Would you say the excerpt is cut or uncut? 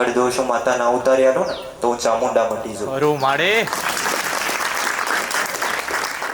uncut